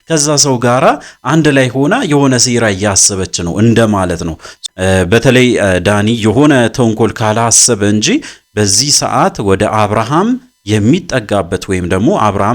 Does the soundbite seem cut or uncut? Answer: cut